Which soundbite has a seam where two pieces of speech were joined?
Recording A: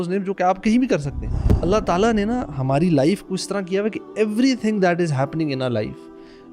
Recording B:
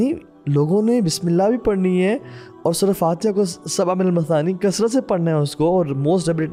A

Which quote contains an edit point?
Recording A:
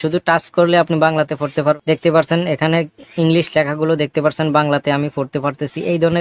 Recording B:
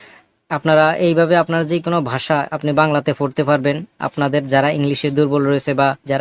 A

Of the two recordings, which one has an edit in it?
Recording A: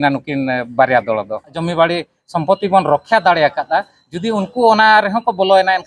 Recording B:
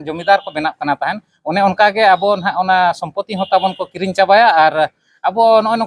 A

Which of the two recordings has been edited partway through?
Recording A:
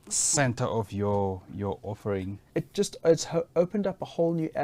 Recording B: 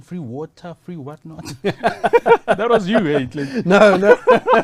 A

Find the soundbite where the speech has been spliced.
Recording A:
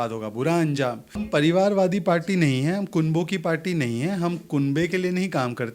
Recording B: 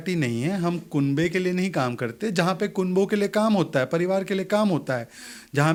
A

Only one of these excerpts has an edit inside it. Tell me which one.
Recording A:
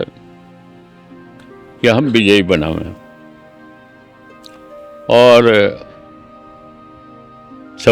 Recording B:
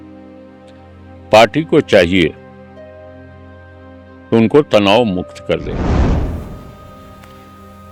A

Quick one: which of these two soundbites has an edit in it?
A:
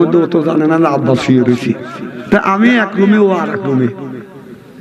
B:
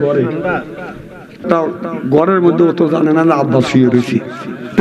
B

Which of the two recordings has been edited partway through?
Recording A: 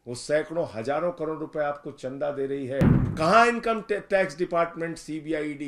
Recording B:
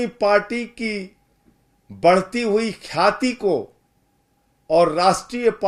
A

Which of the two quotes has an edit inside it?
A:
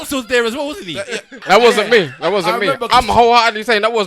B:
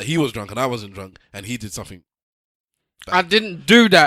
A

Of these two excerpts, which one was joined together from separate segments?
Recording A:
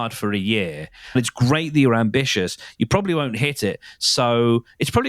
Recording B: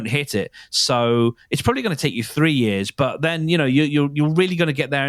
A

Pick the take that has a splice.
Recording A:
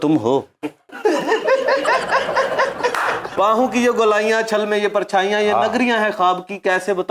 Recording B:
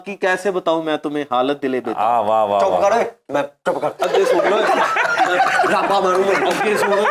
A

